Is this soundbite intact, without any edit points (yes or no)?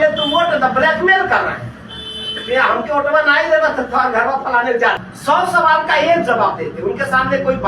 no